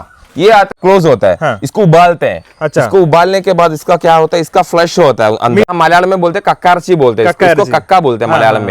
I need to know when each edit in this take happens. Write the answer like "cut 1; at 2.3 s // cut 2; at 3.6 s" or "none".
cut 1; at 0.7 s // cut 2; at 5.6 s